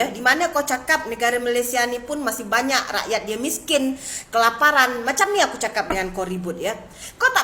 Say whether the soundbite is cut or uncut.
uncut